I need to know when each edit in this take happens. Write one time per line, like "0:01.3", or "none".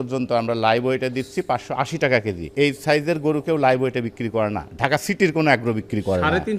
0:02.4